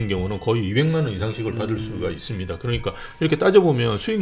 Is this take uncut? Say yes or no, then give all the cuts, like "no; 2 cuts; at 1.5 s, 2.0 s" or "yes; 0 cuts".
yes; 0 cuts